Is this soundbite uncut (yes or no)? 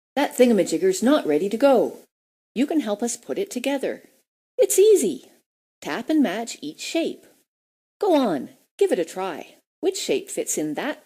no